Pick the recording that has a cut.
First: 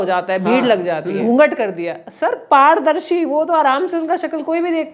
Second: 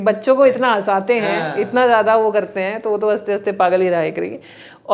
first; 1 cut; at 1.2 s

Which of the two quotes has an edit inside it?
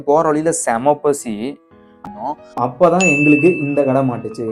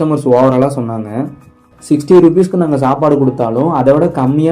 first; 1 cut; at 2.0 s

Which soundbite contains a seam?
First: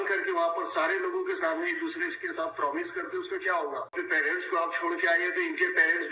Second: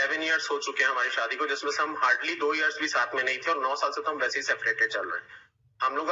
first; 1 cut; at 3.9 s

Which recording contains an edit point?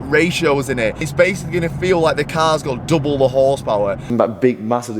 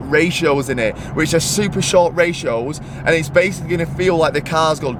first; 2 cuts; at 1.1 s, 4.1 s

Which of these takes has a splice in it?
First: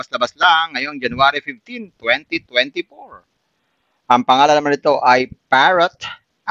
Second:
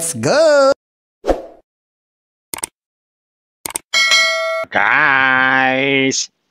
second; 1 cut; at 4.6 s

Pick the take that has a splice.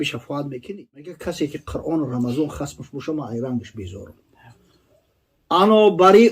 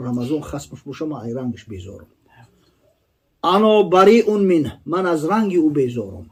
first; 1 cut; at 1.1 s

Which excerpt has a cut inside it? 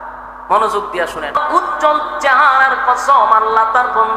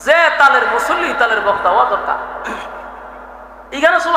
first; 1 cut; at 1.4 s

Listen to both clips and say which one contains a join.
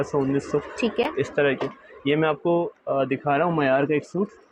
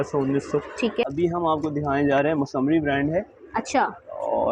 second; 1 cut; at 1.1 s

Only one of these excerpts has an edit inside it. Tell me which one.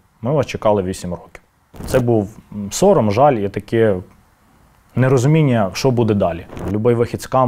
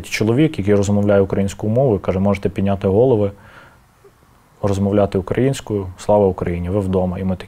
first; 2 cuts; at 1.8 s, 6.5 s

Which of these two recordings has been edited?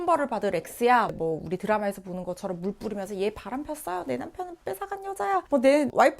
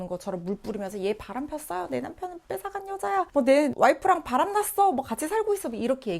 first; 1 cut; at 1.1 s

